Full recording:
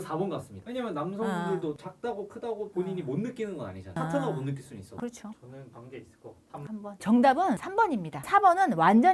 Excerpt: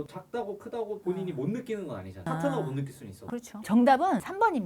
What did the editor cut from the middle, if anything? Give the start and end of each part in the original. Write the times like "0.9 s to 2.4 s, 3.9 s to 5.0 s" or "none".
5.3 s to 6.9 s